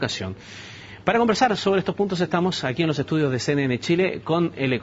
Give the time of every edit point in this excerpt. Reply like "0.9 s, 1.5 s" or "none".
3.9 s